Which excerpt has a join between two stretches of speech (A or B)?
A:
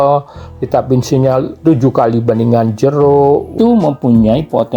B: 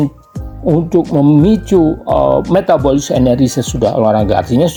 A